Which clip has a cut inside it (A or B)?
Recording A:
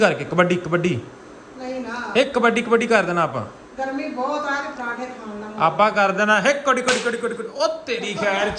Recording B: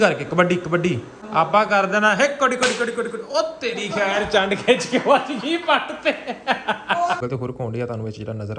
B